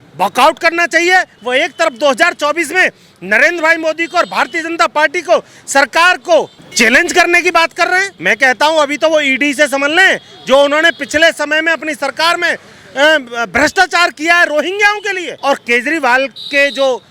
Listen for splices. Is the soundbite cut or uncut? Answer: cut